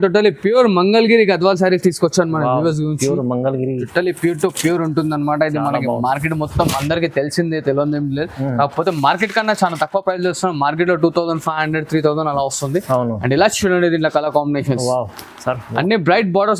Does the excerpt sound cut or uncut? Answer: uncut